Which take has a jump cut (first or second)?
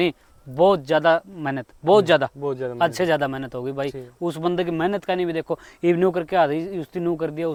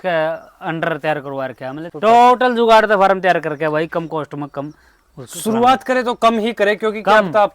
second